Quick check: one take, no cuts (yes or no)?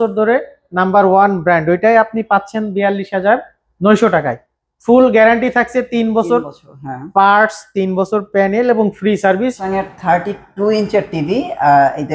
no